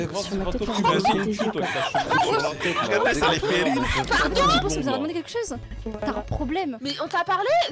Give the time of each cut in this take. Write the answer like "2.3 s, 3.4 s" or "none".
4.1 s

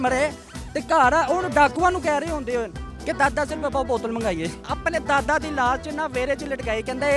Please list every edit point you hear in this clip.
4.6 s

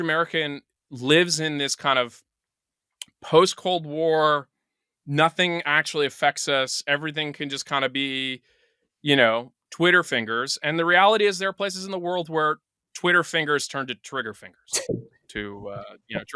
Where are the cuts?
none

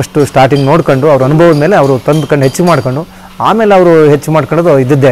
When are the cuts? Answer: none

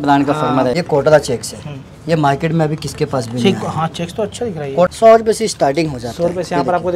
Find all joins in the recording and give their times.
0.7 s, 4.9 s

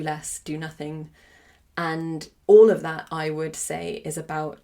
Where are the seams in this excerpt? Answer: 2.3 s

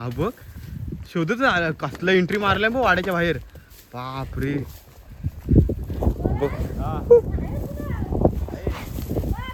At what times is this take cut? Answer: none

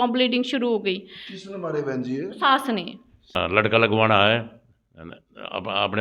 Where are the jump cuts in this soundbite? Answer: 3.3 s

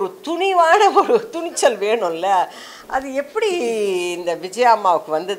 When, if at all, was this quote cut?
none

